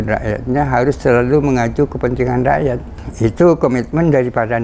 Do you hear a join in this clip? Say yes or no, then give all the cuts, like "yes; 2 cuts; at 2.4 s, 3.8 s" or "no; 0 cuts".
no; 0 cuts